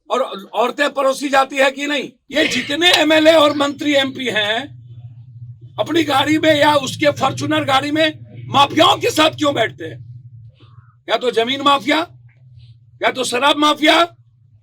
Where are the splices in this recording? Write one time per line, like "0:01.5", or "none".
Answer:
0:02.2